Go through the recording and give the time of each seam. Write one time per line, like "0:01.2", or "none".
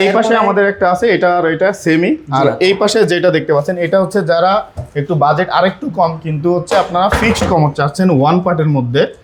none